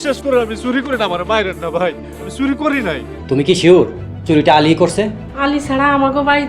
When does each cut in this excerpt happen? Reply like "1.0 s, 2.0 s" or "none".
3.1 s, 5.2 s